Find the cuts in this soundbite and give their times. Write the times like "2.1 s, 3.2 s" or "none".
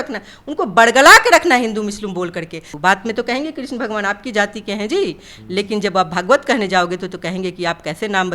2.6 s